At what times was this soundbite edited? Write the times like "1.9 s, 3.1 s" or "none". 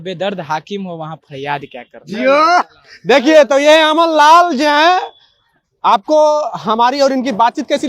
none